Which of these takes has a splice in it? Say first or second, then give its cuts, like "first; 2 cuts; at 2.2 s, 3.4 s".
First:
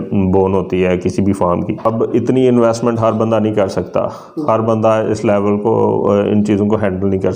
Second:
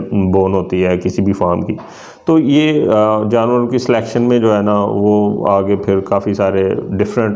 first; 1 cut; at 1.9 s